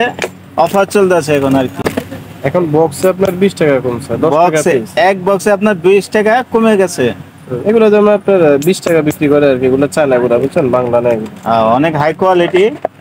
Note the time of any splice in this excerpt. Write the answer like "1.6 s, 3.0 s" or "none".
none